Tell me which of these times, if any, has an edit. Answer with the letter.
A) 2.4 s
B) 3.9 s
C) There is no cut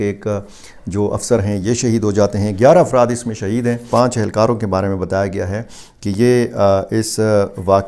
B